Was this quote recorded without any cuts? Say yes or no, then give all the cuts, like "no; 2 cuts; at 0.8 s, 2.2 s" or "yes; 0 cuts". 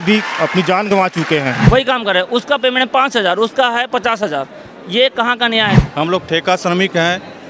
no; 2 cuts; at 1.6 s, 5.7 s